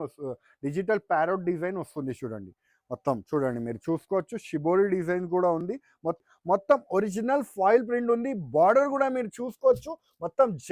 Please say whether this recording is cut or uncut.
cut